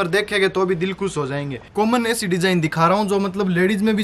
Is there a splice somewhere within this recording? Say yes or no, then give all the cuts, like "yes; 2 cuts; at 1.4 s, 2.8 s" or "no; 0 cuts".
yes; 1 cut; at 1.6 s